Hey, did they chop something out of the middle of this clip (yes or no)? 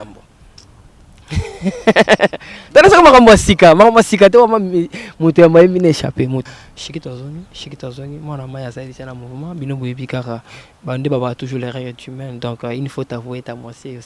yes